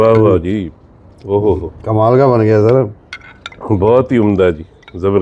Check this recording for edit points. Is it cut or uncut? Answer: uncut